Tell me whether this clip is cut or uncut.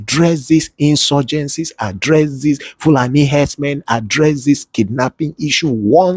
uncut